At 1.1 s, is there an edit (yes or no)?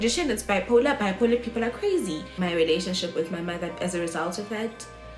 no